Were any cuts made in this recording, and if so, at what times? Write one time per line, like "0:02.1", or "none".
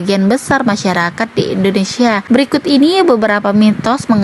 0:02.2